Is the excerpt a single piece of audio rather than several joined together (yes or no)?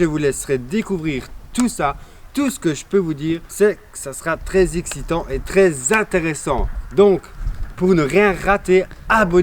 no